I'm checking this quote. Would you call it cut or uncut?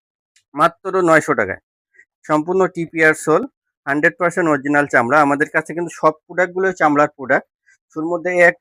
uncut